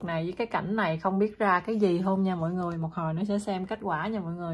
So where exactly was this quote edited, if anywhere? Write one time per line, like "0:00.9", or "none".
none